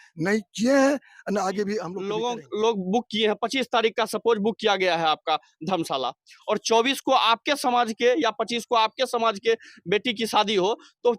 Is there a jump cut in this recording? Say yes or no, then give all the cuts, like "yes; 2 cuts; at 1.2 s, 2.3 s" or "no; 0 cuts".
yes; 1 cut; at 2.0 s